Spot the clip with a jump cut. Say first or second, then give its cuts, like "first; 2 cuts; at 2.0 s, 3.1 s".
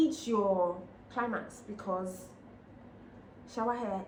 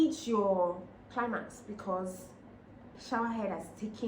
second; 1 cut; at 2.9 s